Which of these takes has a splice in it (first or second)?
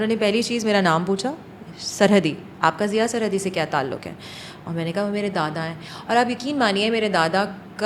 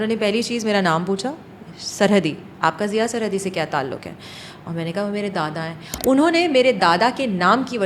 second